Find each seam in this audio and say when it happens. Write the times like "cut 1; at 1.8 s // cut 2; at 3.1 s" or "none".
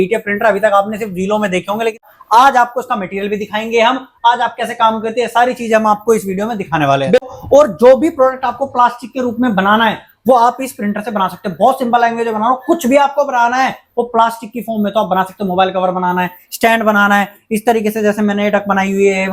cut 1; at 2.0 s // cut 2; at 7.2 s